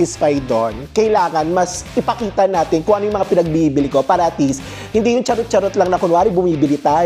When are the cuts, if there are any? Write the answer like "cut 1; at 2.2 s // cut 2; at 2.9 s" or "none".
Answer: none